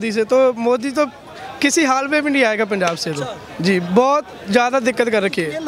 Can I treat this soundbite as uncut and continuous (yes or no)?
yes